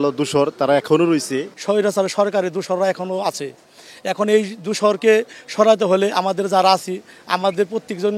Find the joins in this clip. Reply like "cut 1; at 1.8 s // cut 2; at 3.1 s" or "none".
none